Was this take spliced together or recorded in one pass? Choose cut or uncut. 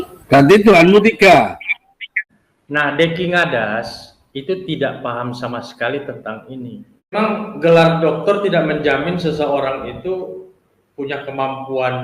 cut